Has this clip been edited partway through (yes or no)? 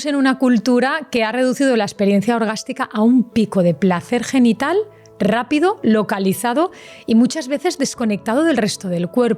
no